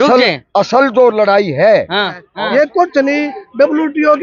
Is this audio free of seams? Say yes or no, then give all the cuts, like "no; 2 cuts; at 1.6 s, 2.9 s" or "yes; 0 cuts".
no; 1 cut; at 2.2 s